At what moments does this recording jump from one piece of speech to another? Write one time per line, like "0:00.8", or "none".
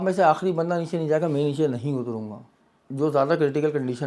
none

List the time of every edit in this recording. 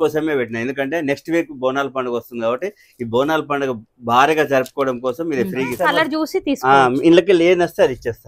0:05.8

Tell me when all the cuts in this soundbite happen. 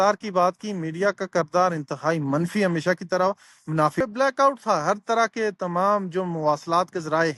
0:04.0

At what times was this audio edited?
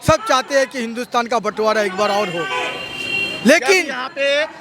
none

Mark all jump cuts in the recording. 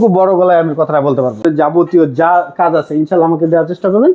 0:01.4

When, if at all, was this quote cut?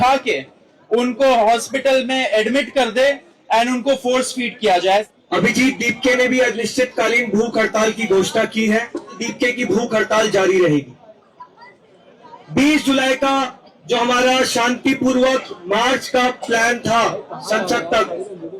0:05.0
0:09.2

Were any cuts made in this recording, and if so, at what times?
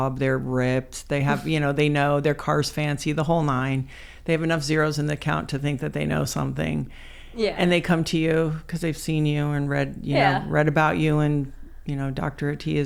none

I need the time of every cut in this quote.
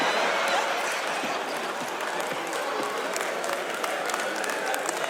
none

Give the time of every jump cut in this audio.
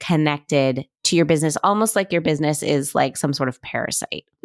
0:01.0

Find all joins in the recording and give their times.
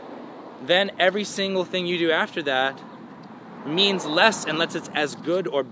none

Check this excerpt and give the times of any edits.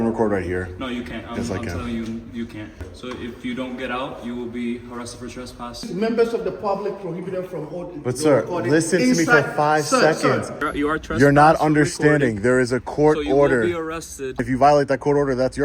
0:02.8
0:05.9
0:10.7
0:14.4

